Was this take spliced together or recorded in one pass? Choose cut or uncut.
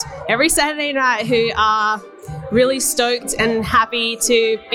uncut